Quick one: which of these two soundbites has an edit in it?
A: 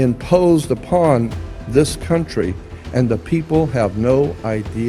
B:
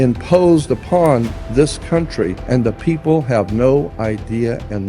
B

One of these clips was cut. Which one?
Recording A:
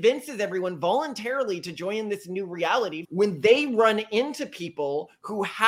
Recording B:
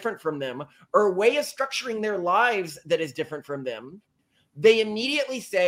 A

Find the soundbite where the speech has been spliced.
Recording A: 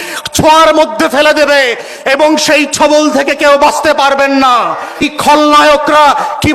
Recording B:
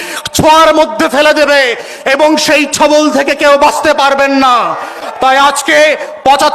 A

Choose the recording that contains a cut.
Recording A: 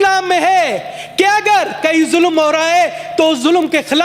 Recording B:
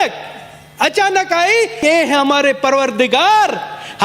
B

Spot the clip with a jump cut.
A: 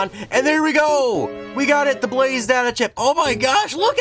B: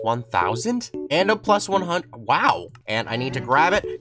B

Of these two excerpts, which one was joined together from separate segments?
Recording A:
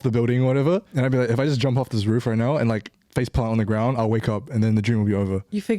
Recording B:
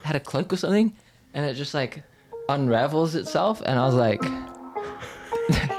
A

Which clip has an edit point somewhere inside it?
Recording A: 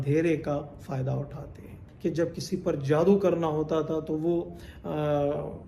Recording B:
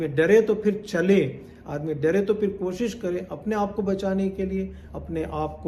A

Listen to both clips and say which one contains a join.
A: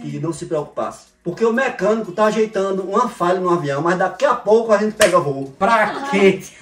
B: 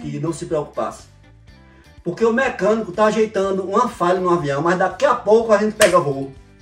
A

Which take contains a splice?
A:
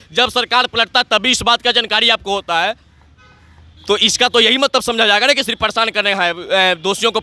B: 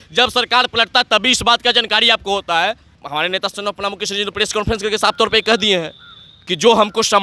B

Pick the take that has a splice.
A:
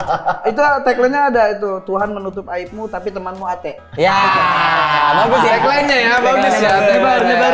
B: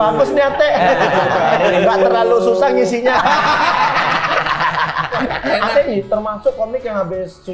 B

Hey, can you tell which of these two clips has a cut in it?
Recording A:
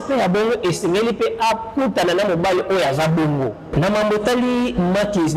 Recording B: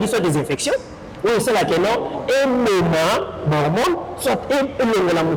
A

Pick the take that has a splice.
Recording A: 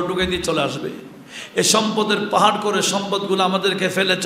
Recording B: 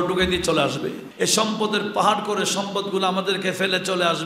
B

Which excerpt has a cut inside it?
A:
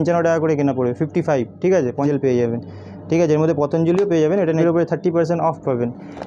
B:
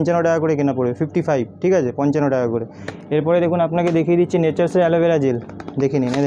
A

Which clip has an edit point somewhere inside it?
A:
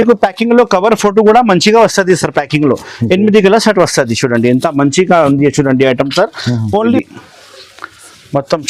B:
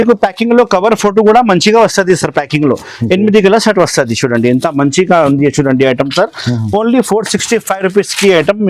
A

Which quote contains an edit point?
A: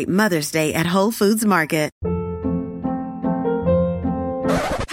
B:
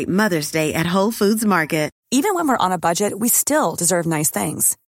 A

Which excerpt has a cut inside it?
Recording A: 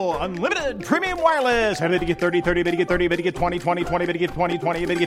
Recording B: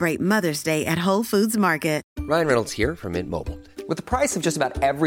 B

